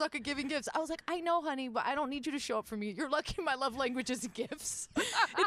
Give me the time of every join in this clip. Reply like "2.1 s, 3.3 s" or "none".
none